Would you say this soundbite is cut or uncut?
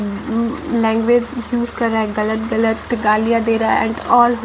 uncut